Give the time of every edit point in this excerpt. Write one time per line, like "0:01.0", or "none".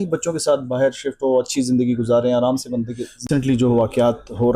0:03.2